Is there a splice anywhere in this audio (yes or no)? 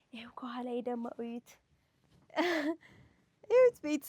no